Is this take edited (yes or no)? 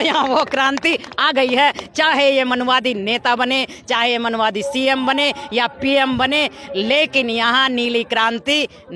no